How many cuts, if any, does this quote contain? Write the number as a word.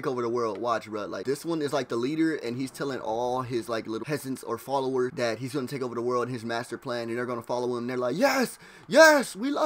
three